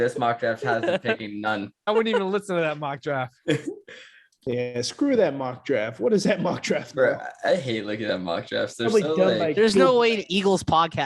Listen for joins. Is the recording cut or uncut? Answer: uncut